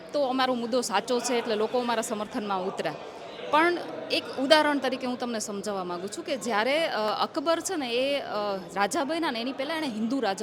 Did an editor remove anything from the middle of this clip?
no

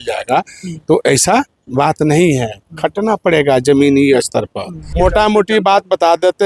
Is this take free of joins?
no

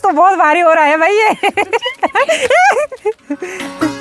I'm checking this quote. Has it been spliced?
no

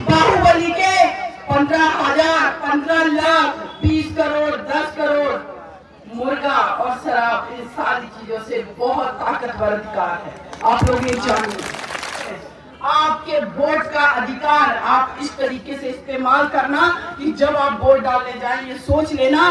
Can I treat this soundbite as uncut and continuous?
no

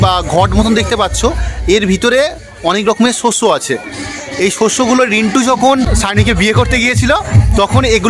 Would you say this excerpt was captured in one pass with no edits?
yes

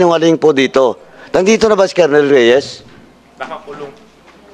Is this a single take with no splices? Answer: yes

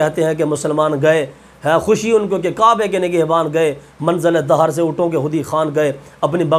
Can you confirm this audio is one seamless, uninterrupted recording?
yes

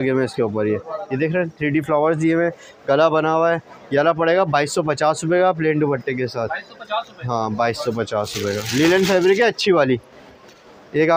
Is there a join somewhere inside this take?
no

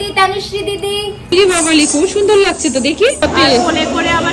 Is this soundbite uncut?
no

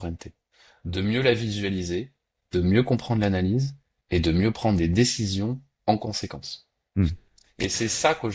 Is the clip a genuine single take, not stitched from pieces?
yes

